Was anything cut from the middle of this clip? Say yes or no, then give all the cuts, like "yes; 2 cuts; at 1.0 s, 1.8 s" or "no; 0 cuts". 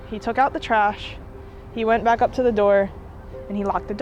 no; 0 cuts